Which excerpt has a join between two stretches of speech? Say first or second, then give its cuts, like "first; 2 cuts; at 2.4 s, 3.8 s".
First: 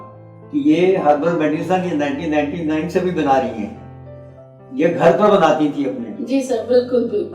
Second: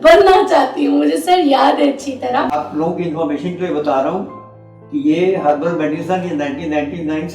second; 1 cut; at 2.5 s